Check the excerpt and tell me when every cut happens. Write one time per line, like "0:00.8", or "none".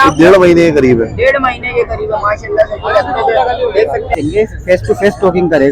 0:04.1